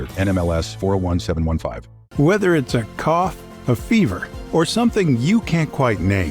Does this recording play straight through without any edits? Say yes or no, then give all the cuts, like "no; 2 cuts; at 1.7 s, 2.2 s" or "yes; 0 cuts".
no; 1 cut; at 2.0 s